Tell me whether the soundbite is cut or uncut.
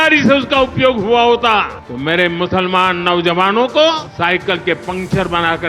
cut